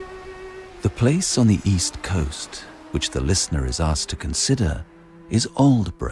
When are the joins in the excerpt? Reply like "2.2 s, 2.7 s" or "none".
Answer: 5.2 s